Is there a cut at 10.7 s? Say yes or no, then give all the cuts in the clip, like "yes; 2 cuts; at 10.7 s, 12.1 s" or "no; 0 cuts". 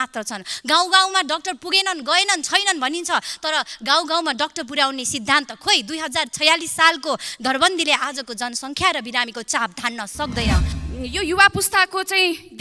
yes; 1 cut; at 10.7 s